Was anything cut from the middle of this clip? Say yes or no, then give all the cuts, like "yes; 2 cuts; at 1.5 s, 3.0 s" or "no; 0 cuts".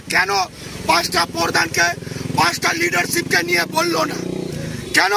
no; 0 cuts